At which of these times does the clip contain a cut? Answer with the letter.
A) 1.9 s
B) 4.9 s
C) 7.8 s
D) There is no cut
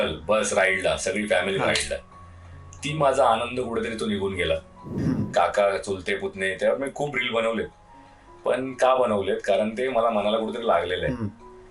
B